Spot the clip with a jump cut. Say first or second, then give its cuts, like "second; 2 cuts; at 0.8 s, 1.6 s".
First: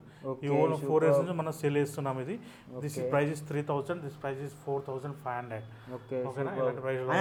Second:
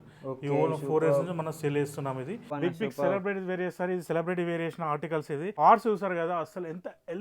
second; 2 cuts; at 2.5 s, 5.5 s